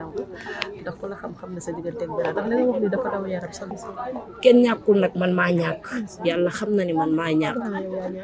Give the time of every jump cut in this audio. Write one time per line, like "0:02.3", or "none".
0:03.6